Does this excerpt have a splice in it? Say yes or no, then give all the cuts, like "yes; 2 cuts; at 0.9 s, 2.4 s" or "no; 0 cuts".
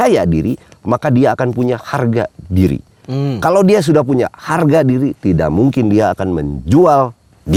no; 0 cuts